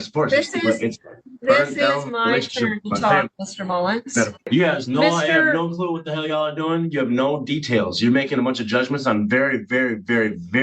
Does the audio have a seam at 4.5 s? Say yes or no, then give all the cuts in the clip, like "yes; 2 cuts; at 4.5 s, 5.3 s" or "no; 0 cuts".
yes; 1 cut; at 4.5 s